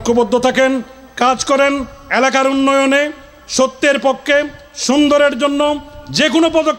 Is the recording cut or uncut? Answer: uncut